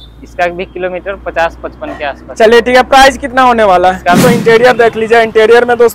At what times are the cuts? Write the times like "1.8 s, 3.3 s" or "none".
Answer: 4.2 s